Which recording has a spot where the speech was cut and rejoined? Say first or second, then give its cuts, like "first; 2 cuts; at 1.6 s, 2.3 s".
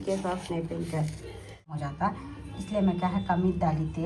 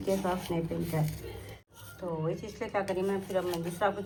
first; 1 cut; at 1.8 s